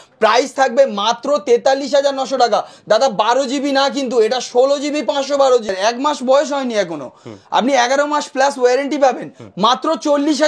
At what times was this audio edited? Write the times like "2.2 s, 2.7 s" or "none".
5.7 s

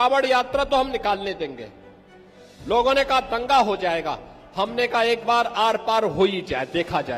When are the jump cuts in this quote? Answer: none

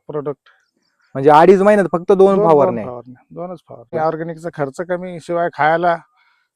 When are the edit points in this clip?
3.9 s

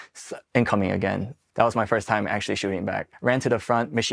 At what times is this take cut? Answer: 3.1 s

